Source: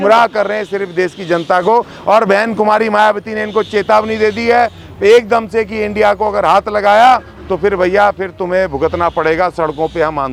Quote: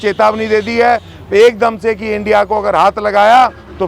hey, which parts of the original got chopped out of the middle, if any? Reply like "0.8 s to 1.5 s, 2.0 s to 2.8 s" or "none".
none